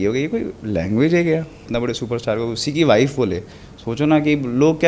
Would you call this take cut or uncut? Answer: cut